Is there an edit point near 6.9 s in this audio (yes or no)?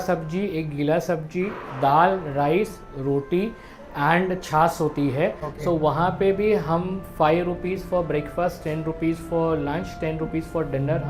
no